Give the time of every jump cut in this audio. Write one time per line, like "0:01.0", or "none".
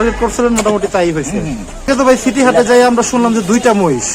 0:01.9